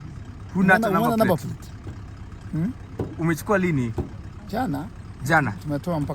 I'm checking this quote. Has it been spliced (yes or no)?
no